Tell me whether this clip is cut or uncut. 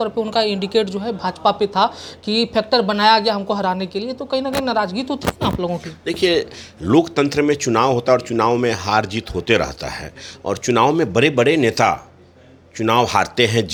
uncut